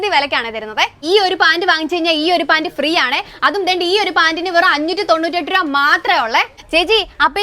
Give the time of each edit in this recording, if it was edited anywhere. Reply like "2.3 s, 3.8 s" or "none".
1.0 s, 6.6 s